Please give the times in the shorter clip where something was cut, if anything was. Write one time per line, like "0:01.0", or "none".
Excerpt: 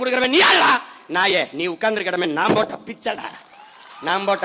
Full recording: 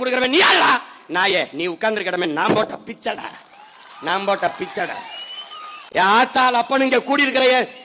none